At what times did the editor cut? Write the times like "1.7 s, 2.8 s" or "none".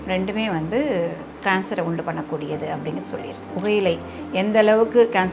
3.5 s